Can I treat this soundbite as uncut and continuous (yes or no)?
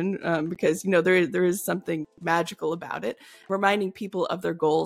no